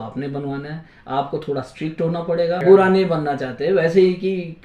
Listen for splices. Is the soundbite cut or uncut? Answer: cut